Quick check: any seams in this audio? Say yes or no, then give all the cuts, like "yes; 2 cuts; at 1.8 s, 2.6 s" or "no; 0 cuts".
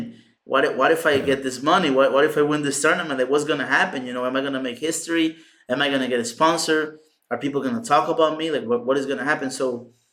no; 0 cuts